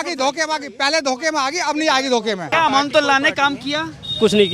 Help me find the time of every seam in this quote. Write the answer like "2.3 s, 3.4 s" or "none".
2.5 s